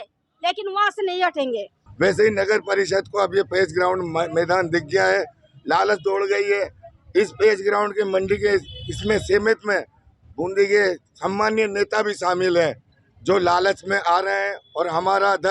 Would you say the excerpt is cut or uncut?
cut